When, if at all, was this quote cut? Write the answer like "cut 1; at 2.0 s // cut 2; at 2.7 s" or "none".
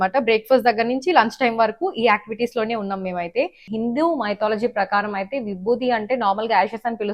cut 1; at 3.7 s